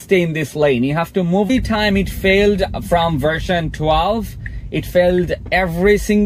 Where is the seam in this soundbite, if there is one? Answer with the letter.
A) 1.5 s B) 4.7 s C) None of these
A